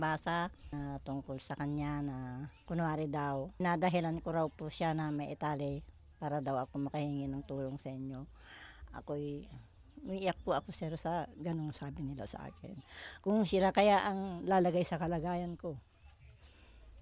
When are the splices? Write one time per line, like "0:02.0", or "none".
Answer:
0:00.7
0:02.5
0:03.6